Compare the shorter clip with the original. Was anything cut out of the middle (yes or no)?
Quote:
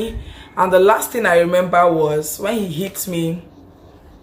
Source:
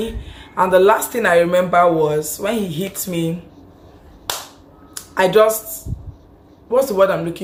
no